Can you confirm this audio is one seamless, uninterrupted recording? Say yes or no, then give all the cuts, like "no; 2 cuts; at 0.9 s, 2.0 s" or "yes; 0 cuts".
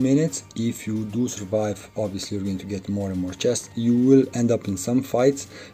no; 1 cut; at 3.7 s